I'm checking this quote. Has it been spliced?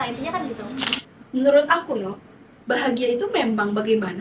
yes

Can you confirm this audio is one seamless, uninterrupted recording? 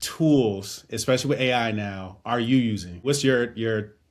no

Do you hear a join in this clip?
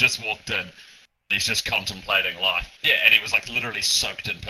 yes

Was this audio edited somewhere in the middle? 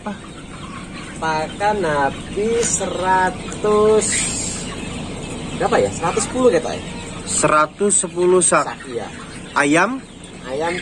no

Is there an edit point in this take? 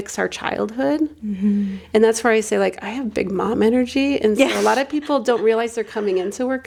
no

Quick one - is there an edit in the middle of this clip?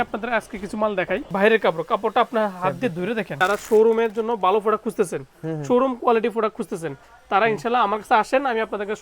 yes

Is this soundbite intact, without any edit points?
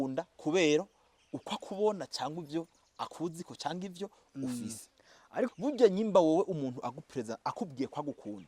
no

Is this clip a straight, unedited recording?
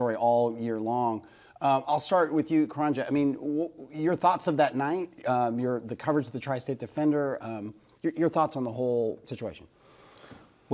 yes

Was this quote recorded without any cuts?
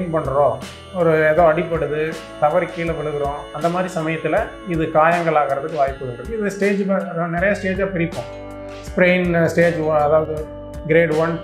yes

